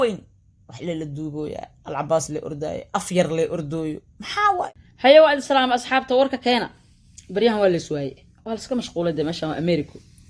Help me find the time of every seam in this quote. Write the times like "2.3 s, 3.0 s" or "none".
4.7 s

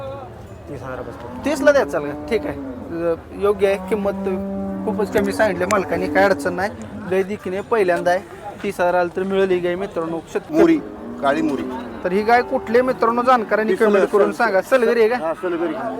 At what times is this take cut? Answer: 10.5 s

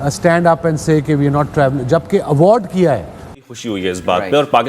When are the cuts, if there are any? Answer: 3.5 s

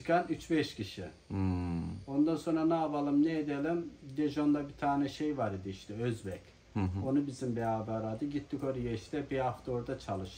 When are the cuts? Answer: none

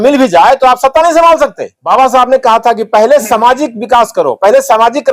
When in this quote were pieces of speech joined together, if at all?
1.8 s

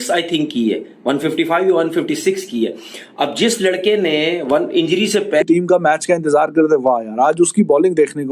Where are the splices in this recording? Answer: 5.4 s

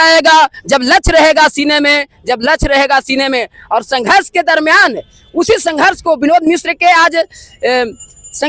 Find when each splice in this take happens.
none

